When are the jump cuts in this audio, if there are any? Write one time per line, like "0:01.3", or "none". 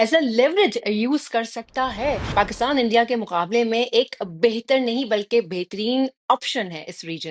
0:02.3